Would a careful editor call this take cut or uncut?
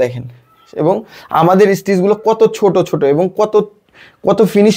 uncut